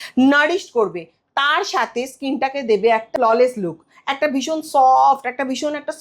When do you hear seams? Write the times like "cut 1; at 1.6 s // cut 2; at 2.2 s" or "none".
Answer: cut 1; at 3.1 s